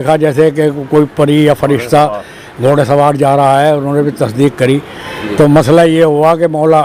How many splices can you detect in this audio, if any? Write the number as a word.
zero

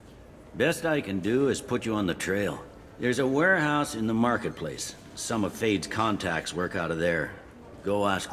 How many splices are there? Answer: one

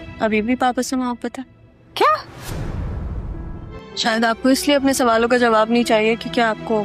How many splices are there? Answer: one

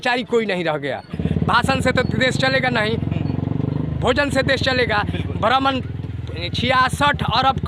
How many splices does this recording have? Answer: one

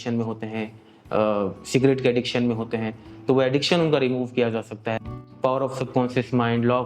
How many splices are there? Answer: one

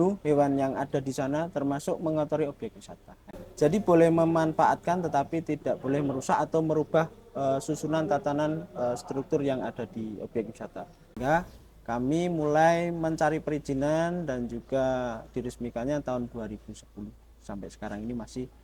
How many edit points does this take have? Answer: two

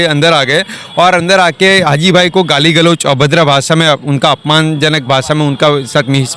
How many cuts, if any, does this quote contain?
zero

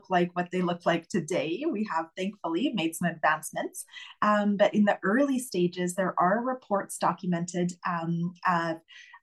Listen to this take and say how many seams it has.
zero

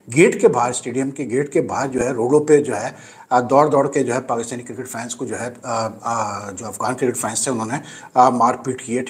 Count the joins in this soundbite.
zero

